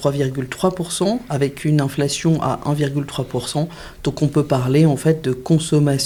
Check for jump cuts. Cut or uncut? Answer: uncut